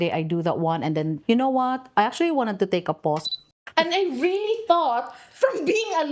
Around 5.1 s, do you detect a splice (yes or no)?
no